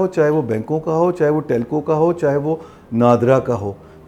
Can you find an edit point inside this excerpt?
no; 0 cuts

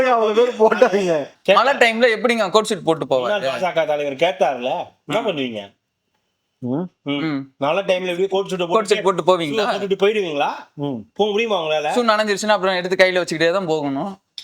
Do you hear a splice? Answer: yes; 1 cut; at 1.3 s

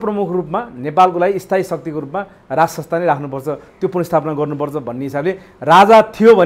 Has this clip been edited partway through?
no; 0 cuts

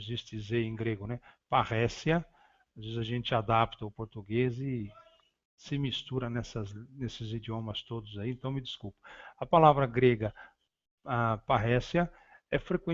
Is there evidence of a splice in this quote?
yes; 1 cut; at 9.8 s

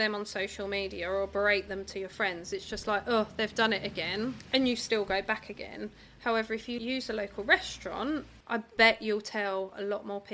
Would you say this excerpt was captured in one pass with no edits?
no; 3 cuts; at 4.4 s, 6.8 s, 8.3 s

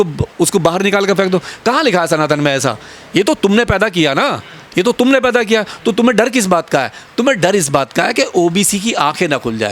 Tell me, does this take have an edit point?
no; 0 cuts

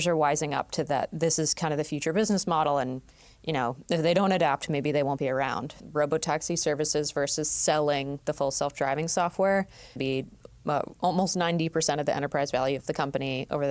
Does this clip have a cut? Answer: yes; 2 cuts; at 5.8 s, 10.0 s

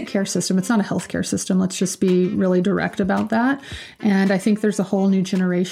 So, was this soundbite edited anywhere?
no; 0 cuts

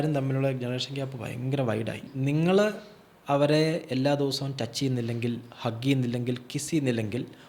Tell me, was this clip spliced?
yes; 1 cut; at 2.1 s

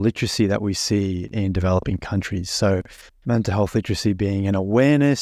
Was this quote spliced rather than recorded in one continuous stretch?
no; 0 cuts

